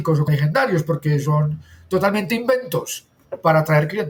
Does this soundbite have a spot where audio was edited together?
no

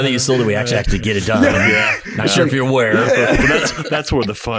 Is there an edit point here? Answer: no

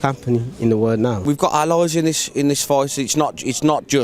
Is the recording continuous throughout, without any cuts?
no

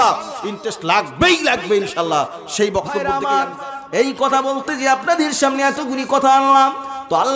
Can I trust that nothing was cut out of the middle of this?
no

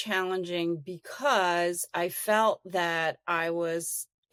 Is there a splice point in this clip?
no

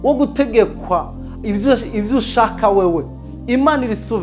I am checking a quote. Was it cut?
no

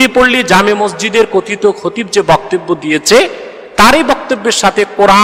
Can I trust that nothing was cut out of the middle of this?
yes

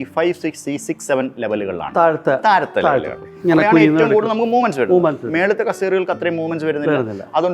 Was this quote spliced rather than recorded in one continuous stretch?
no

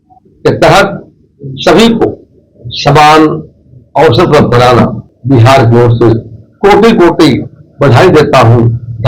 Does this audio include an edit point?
yes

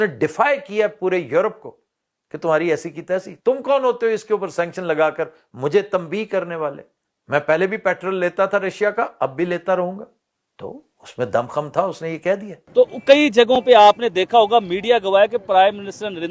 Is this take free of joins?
no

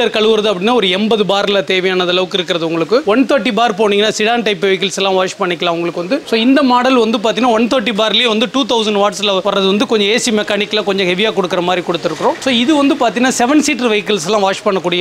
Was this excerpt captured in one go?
yes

